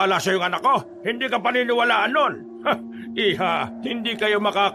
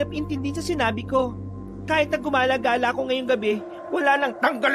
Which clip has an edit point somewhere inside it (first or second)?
first